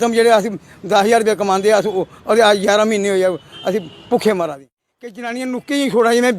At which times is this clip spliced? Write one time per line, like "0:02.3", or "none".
0:04.7